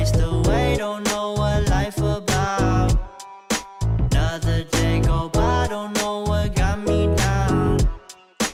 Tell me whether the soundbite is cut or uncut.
uncut